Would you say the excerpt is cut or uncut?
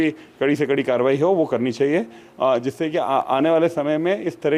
uncut